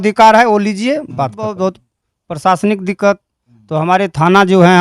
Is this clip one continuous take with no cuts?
no; 1 cut; at 1.6 s

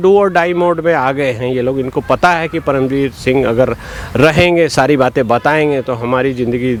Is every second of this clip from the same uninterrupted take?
yes; 0 cuts

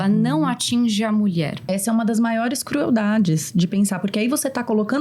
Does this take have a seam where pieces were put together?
yes; 1 cut; at 1.7 s

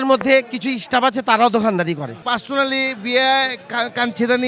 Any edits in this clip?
yes; 1 cut; at 2.3 s

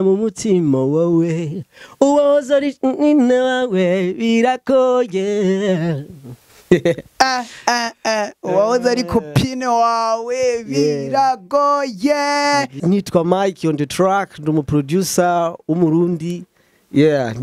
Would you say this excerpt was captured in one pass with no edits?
no; 1 cut; at 12.8 s

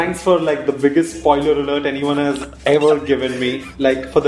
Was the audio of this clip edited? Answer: no; 0 cuts

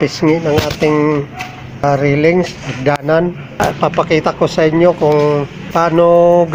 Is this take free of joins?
no; 3 cuts; at 1.8 s, 3.6 s, 5.6 s

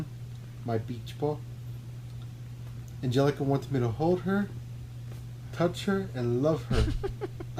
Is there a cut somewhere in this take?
no; 0 cuts

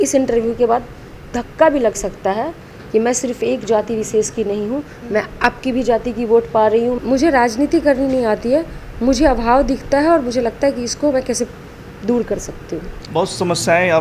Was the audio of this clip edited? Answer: yes; 2 cuts; at 7.0 s, 13.0 s

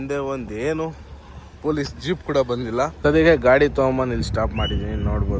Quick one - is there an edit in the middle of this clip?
yes; 1 cut; at 2.9 s

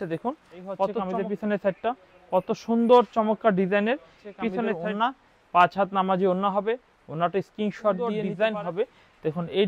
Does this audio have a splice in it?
yes; 3 cuts; at 1.0 s, 4.7 s, 8.2 s

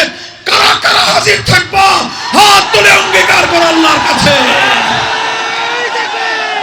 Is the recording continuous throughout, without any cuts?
yes; 0 cuts

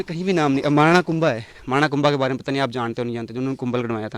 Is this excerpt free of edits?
yes; 0 cuts

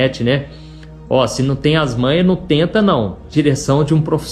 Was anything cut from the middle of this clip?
yes; 1 cut; at 3.3 s

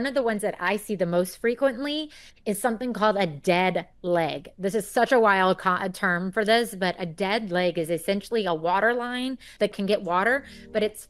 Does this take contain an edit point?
no; 0 cuts

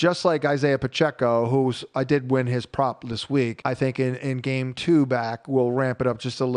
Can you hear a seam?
yes; 1 cut; at 3.6 s

